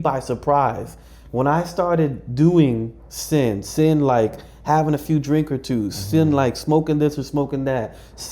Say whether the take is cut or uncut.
uncut